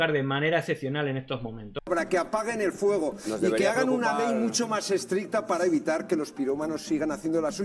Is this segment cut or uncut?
cut